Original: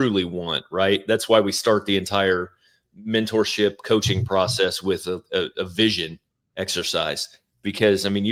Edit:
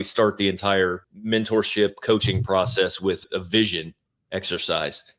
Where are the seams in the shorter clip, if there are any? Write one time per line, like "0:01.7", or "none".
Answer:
0:01.1
0:03.2